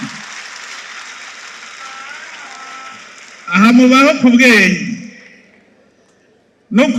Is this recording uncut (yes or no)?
yes